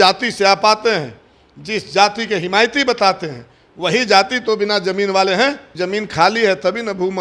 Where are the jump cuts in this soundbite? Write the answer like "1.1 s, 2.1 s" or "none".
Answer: 5.7 s